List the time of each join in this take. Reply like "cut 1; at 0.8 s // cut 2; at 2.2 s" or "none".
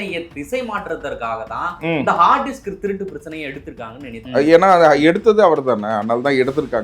cut 1; at 4.2 s